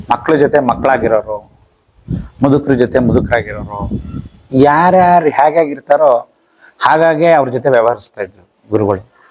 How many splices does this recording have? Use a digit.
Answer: 0